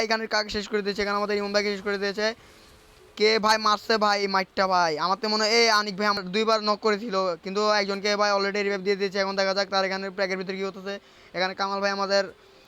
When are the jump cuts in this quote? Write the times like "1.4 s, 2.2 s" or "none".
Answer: none